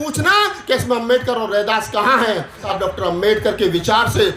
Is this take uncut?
no; 1 cut; at 2.7 s

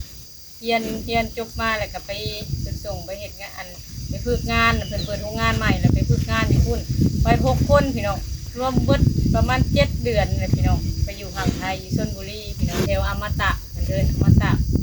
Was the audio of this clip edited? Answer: yes; 2 cuts; at 8.5 s, 12.9 s

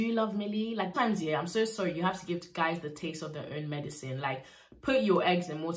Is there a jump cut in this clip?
yes; 1 cut; at 0.9 s

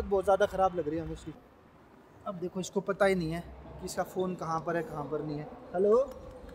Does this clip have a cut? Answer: no; 0 cuts

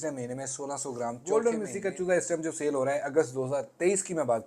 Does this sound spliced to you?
yes; 1 cut; at 1.2 s

